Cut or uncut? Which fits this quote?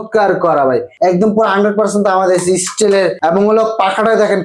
cut